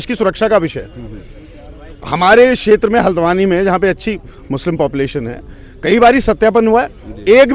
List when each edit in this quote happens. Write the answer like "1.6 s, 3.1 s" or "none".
none